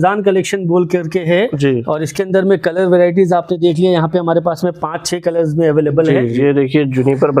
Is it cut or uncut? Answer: cut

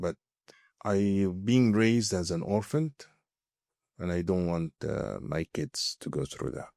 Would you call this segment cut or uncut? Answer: uncut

